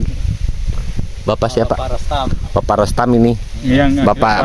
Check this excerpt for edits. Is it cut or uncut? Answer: uncut